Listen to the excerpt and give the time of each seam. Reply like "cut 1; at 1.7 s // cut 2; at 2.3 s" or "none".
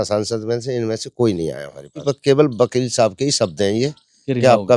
cut 1; at 2.1 s